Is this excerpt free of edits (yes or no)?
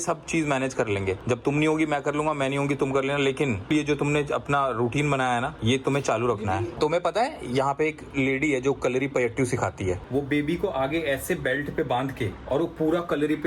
no